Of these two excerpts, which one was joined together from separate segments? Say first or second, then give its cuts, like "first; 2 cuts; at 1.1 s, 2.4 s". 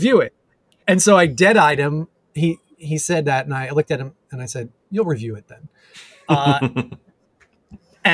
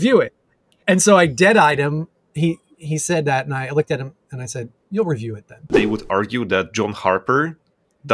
second; 1 cut; at 5.8 s